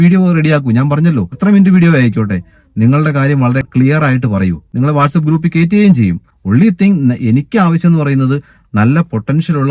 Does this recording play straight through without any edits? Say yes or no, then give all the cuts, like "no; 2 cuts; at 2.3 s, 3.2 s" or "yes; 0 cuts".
no; 3 cuts; at 1.3 s, 4.6 s, 6.3 s